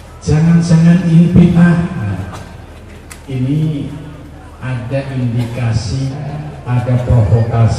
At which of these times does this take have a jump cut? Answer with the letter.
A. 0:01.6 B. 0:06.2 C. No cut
B